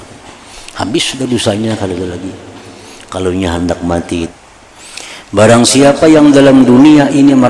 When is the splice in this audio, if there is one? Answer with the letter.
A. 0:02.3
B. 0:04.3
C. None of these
B